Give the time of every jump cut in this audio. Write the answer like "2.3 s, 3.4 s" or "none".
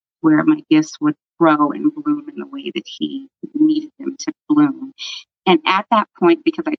none